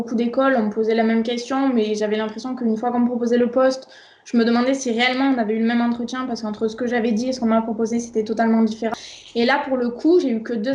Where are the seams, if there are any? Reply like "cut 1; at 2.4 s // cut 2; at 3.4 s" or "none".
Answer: cut 1; at 8.9 s